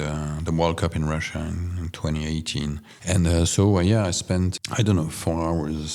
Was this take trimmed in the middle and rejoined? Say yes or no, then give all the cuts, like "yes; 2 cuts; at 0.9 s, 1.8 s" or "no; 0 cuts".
yes; 1 cut; at 2.9 s